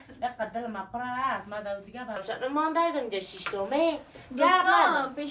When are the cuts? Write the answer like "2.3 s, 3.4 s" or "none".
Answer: 2.2 s